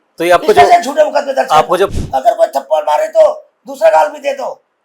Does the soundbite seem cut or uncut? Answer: cut